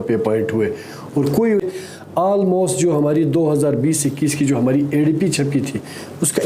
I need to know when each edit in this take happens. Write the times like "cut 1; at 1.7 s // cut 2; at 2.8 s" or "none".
cut 1; at 1.6 s

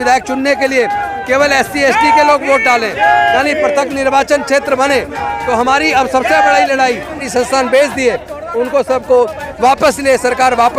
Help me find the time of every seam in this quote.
cut 1; at 7.3 s

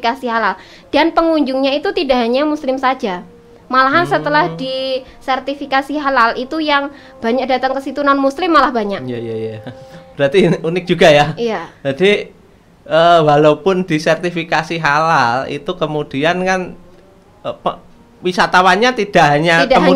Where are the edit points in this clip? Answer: none

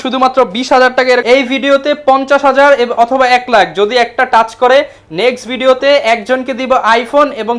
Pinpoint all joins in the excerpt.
cut 1; at 1.2 s

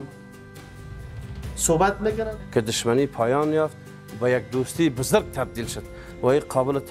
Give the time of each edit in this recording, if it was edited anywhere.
cut 1; at 2.3 s

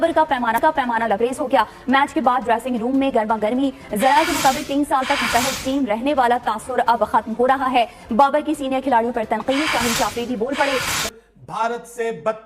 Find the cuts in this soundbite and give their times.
cut 1; at 11.0 s

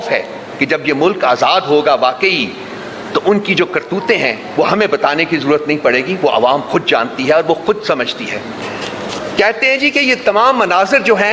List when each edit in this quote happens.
cut 1; at 8.6 s

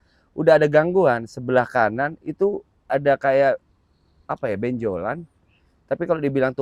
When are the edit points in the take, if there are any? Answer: none

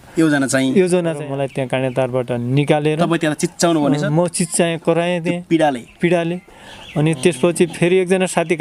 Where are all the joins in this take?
cut 1; at 1.2 s

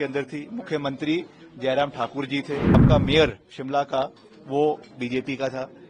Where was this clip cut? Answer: cut 1; at 2.8 s

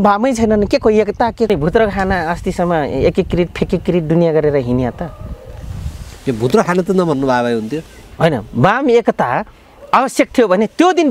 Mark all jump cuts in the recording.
cut 1; at 1.5 s

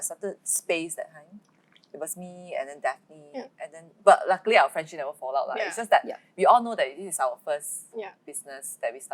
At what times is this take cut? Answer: none

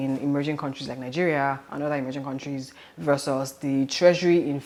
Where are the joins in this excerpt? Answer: none

